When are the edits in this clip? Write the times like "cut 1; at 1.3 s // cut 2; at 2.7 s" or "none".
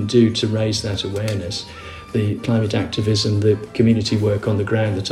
none